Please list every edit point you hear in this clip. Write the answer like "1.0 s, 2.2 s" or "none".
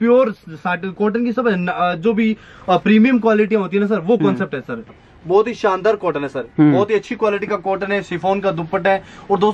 5.0 s